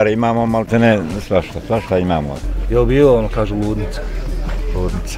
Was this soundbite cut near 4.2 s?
no; 1 cut; at 2.4 s

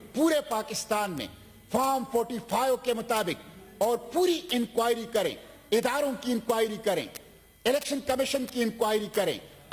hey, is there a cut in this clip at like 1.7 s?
no; 0 cuts

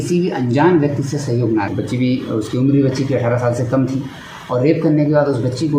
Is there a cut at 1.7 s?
yes; 1 cut; at 1.7 s

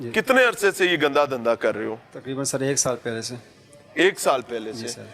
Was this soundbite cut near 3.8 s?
no; 0 cuts

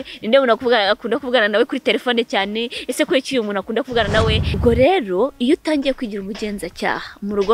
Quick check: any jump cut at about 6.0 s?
no; 1 cut; at 4.5 s

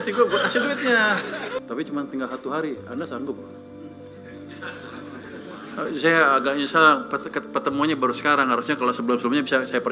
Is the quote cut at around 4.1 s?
no; 1 cut; at 1.6 s

